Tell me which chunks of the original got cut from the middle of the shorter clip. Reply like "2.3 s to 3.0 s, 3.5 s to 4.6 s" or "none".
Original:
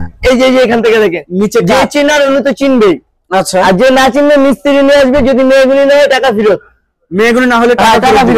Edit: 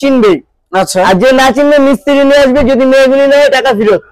none